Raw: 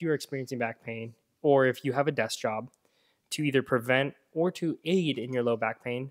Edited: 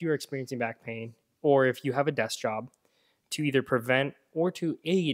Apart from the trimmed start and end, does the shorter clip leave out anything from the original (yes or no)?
no